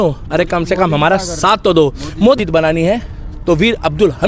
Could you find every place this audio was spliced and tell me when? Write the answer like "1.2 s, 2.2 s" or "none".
2.4 s